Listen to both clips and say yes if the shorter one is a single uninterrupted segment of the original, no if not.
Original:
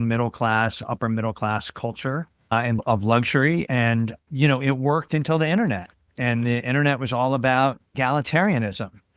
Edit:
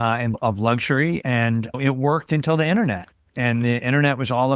no